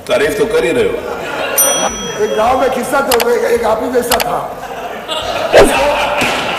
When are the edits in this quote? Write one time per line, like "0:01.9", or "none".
0:01.9